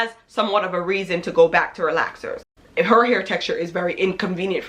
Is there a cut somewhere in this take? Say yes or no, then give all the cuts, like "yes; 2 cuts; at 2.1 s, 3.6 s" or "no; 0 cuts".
yes; 1 cut; at 2.6 s